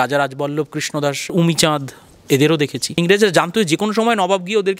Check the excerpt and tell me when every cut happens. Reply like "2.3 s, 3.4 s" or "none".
3.0 s

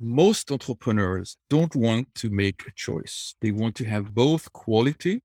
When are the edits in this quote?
1.3 s

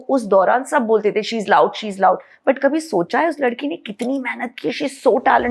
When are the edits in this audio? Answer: none

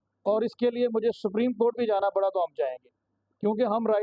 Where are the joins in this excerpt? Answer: none

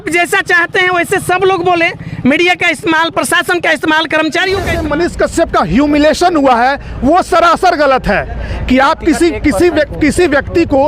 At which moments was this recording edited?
4.8 s

